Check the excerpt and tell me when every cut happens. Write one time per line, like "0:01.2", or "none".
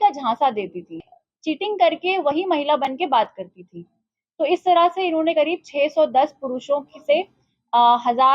0:01.1